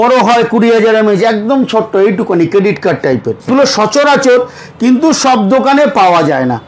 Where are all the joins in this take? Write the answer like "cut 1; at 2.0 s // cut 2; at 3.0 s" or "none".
cut 1; at 3.5 s